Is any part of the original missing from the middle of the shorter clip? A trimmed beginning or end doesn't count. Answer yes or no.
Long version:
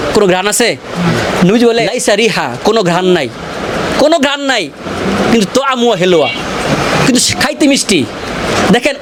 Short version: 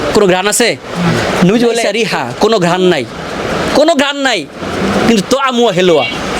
yes